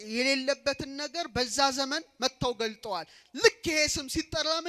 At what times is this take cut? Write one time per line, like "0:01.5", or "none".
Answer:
none